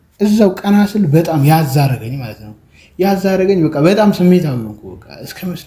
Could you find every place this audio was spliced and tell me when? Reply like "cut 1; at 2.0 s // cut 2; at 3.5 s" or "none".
none